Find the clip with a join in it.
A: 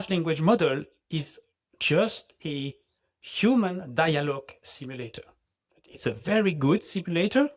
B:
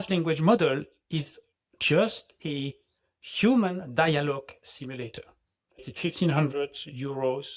B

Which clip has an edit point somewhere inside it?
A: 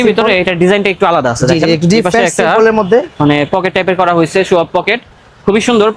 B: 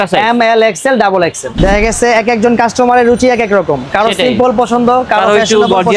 B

